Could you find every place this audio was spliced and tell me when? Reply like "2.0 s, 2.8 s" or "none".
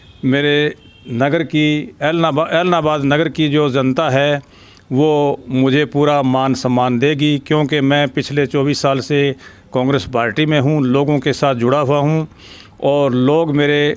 none